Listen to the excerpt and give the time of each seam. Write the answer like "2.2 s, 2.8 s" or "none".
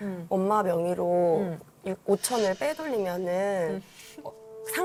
none